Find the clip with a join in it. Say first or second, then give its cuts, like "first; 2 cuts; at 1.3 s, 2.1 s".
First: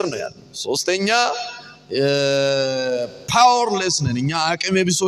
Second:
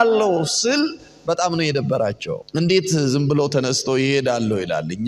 second; 1 cut; at 2.4 s